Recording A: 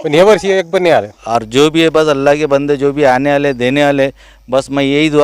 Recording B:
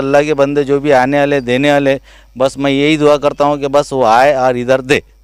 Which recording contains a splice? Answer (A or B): A